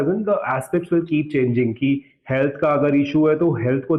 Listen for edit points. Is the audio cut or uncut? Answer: uncut